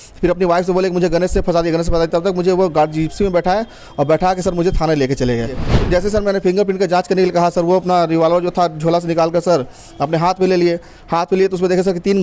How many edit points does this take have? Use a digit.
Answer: 1